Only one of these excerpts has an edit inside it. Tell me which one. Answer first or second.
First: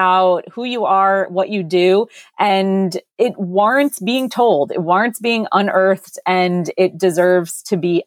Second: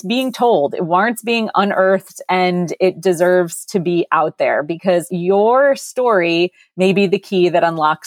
second